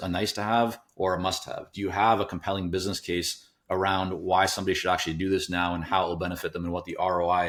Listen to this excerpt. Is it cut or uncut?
uncut